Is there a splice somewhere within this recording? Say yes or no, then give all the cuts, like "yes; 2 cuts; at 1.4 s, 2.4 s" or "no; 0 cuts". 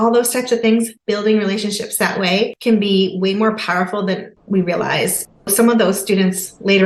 yes; 3 cuts; at 1.0 s, 2.6 s, 4.4 s